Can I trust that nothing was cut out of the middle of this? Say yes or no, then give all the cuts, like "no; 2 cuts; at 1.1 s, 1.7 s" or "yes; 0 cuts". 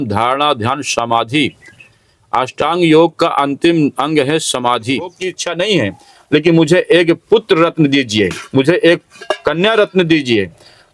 no; 1 cut; at 5.4 s